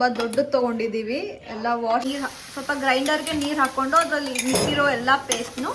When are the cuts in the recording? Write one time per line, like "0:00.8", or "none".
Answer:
0:02.0